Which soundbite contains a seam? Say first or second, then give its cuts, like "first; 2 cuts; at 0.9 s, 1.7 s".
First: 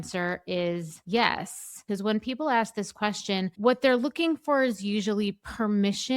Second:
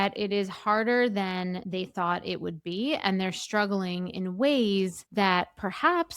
first; 2 cuts; at 0.9 s, 1.8 s